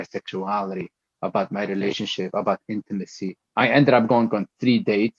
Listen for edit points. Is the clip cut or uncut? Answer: cut